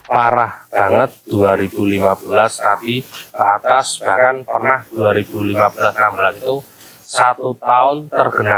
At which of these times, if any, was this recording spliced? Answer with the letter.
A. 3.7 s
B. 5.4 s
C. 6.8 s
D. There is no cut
D